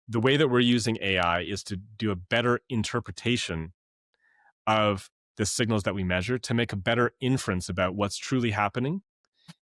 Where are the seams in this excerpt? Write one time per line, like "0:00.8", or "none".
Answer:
none